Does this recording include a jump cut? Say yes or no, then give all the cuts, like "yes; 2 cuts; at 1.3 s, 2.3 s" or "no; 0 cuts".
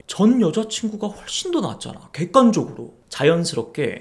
no; 0 cuts